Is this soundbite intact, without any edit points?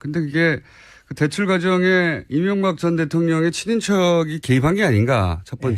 no; 1 cut; at 3.4 s

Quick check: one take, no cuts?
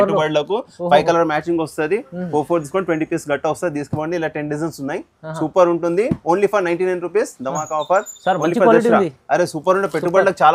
yes; 0 cuts

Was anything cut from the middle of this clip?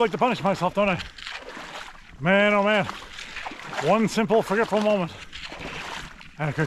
no; 0 cuts

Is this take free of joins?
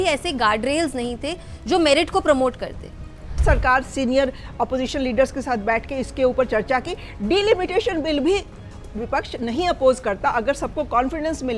no; 1 cut; at 3.4 s

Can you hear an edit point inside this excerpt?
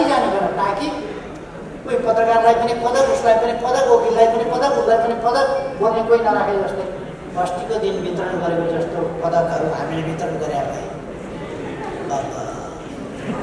yes; 1 cut; at 7.2 s

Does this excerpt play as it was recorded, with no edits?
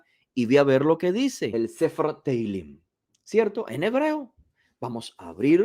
no; 1 cut; at 1.5 s

